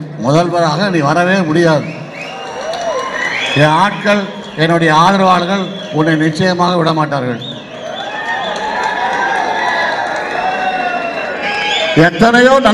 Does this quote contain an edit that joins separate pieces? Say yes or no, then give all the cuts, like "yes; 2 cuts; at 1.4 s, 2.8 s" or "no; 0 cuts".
yes; 1 cut; at 11.4 s